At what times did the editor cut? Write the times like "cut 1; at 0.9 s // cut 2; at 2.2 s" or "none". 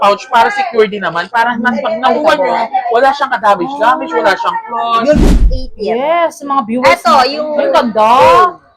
cut 1; at 5.3 s